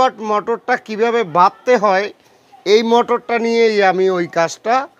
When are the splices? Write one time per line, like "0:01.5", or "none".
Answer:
none